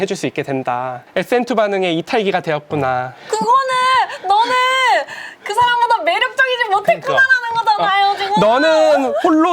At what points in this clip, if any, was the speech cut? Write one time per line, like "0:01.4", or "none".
0:01.0